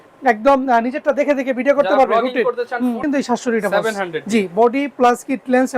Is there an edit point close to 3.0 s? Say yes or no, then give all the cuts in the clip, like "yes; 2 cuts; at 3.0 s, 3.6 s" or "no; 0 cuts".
yes; 1 cut; at 3.0 s